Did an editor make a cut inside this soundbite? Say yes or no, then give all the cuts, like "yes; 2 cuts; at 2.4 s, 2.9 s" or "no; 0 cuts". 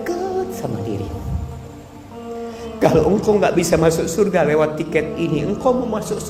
no; 0 cuts